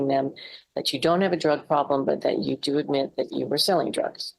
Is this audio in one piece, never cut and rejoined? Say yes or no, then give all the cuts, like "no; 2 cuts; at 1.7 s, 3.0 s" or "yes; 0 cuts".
yes; 0 cuts